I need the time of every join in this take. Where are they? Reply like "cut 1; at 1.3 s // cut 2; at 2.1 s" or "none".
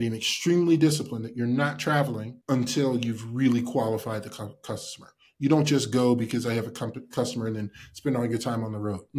cut 1; at 2.3 s